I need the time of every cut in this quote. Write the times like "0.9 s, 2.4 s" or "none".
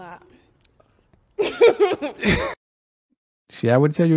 none